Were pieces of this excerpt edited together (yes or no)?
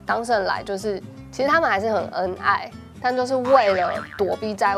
no